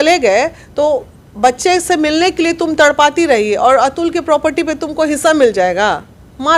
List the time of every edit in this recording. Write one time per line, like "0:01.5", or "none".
none